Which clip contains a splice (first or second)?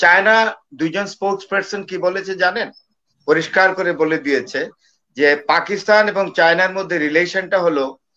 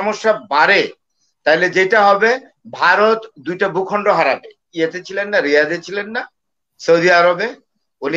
second